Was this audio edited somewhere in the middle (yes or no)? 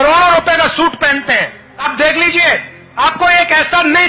yes